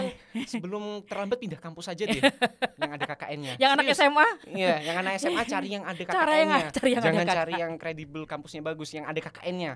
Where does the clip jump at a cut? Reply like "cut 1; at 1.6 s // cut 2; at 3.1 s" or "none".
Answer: none